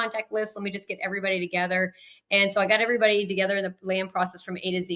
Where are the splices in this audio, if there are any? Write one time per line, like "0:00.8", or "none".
none